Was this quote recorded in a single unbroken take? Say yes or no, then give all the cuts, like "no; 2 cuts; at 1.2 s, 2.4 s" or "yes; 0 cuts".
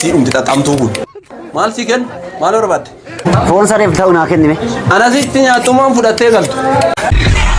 yes; 0 cuts